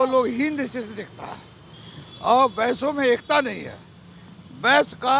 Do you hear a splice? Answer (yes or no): no